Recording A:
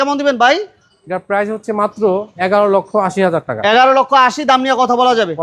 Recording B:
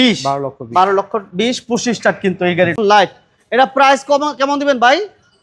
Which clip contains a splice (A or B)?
B